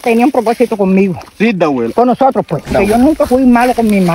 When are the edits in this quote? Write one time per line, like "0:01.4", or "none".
0:02.7